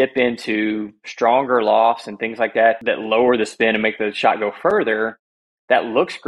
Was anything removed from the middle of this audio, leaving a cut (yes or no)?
yes